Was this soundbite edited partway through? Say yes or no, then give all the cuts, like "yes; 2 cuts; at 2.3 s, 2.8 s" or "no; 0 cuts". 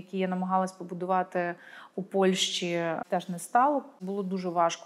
yes; 2 cuts; at 3.0 s, 3.9 s